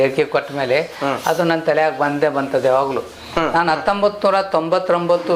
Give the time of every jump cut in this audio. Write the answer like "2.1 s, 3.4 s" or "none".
none